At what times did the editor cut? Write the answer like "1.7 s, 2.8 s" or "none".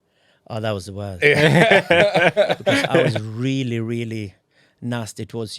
3.2 s